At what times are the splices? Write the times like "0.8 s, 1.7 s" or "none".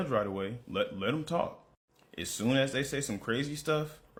none